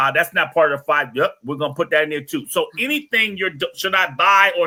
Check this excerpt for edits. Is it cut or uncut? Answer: uncut